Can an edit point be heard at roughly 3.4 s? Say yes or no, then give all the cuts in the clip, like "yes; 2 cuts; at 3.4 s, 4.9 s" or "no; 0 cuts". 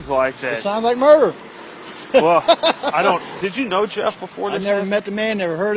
yes; 1 cut; at 3.4 s